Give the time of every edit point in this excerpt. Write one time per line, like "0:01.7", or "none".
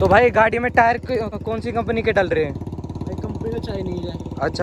none